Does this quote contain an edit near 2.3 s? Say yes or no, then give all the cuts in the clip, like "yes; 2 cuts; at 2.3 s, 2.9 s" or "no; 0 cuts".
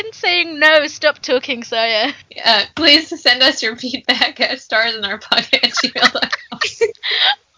yes; 1 cut; at 2.3 s